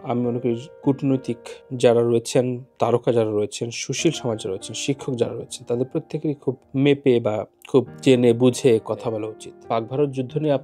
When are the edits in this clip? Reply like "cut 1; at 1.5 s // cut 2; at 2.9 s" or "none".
cut 1; at 9.5 s